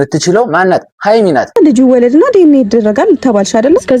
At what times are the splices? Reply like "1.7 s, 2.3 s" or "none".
1.6 s